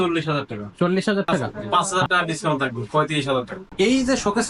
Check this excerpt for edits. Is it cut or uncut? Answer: cut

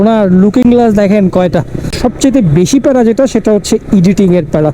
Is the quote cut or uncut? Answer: cut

